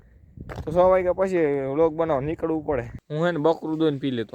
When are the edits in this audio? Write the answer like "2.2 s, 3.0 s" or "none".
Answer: 3.0 s